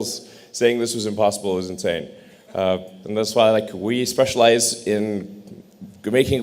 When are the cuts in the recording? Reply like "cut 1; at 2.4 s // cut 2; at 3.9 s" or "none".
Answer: cut 1; at 2.9 s